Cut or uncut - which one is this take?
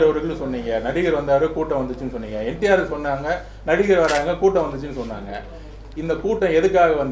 uncut